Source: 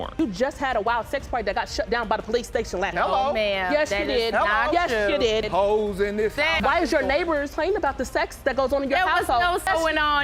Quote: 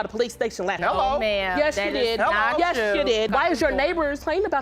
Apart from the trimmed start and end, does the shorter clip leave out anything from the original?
yes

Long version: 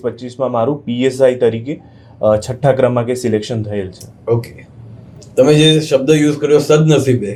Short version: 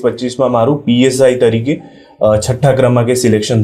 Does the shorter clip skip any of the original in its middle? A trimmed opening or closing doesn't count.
no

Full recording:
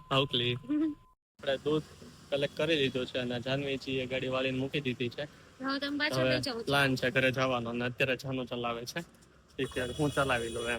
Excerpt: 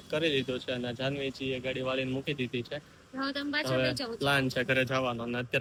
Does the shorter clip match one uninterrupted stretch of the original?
yes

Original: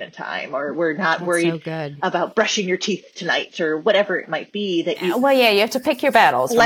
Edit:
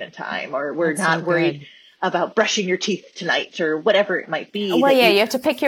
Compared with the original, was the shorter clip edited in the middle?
yes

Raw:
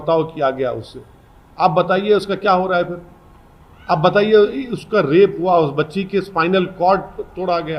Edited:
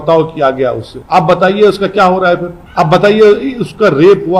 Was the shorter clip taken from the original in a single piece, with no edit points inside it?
no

